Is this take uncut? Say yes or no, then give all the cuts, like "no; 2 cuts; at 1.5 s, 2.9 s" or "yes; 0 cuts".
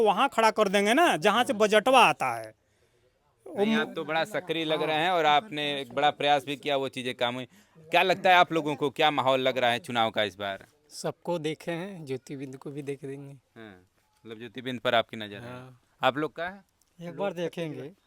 yes; 0 cuts